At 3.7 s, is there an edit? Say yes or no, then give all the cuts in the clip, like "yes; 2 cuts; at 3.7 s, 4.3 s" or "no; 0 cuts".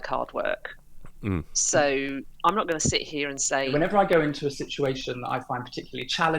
yes; 1 cut; at 3.7 s